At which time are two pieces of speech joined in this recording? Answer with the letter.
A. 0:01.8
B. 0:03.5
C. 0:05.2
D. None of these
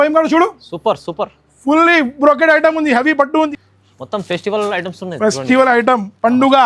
B